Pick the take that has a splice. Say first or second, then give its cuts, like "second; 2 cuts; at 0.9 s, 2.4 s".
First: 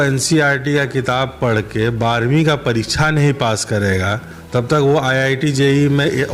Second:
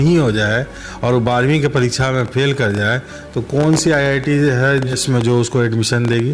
second; 1 cut; at 5.0 s